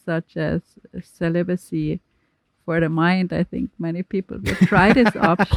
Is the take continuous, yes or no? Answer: yes